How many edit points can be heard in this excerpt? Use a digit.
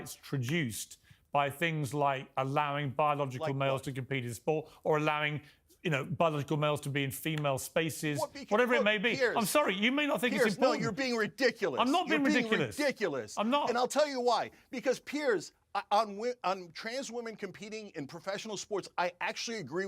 1